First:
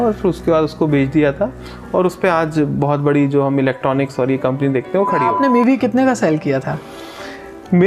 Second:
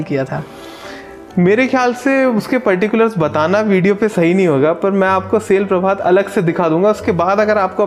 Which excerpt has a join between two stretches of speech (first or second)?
first